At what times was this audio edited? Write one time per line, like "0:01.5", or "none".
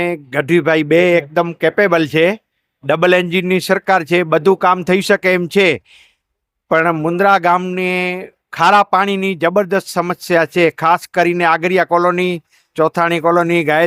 none